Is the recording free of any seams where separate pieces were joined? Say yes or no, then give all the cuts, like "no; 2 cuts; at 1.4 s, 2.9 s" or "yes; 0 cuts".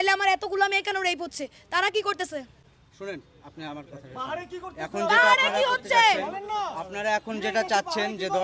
yes; 0 cuts